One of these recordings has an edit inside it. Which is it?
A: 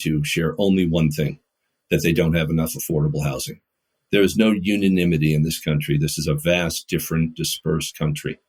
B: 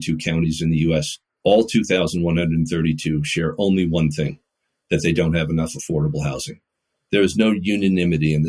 B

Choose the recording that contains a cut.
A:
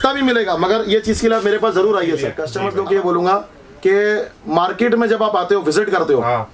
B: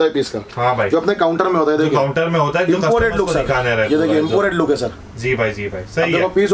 A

